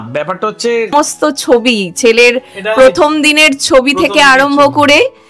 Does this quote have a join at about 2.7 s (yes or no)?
no